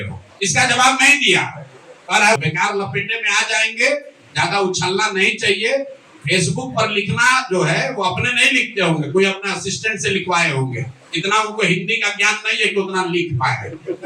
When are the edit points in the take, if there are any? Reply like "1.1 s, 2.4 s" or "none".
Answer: 2.4 s